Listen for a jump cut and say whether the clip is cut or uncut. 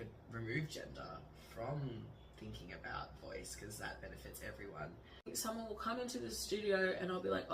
cut